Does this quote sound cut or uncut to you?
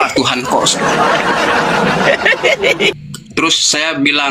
cut